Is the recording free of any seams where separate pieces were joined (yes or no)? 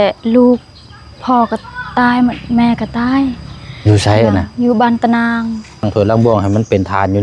no